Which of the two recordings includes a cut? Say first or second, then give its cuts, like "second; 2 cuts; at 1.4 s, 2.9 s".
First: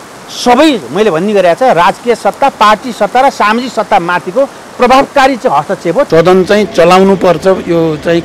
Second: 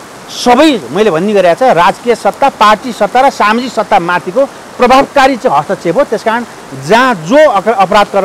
first; 1 cut; at 6.1 s